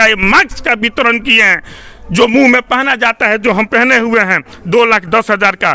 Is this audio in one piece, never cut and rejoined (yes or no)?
yes